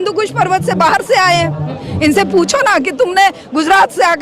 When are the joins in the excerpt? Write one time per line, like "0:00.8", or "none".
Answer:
0:01.8